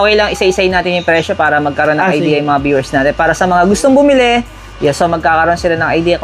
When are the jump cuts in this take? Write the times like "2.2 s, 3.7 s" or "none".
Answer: none